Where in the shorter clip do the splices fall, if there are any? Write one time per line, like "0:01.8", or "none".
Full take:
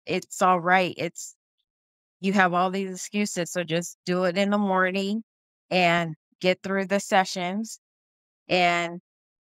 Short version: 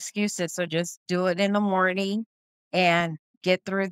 none